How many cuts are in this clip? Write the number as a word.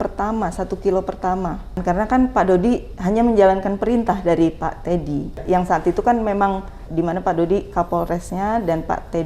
three